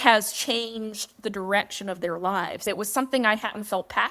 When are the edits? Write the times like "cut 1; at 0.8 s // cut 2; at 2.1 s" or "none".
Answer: cut 1; at 2.6 s